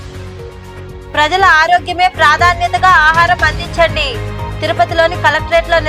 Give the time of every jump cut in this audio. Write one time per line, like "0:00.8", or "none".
0:01.1